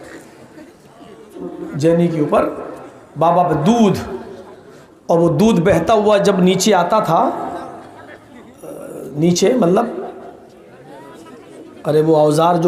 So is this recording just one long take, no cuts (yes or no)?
no